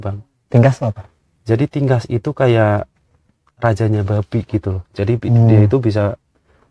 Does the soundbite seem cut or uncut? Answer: uncut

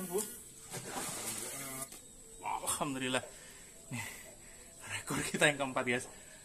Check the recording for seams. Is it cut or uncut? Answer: cut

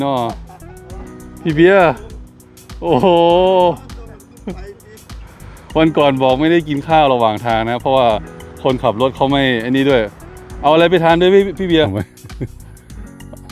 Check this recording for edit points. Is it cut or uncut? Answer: cut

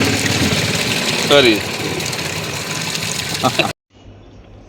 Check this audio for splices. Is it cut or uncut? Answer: uncut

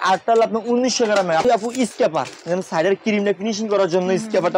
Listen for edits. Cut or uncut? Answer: cut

